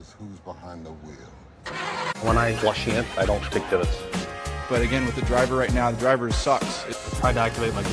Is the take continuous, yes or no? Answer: no